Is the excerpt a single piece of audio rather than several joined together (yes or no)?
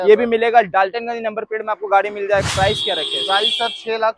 no